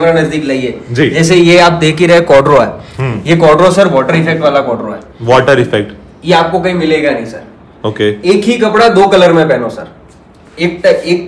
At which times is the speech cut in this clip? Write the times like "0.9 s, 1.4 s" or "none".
none